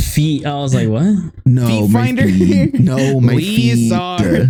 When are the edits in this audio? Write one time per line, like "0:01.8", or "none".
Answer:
none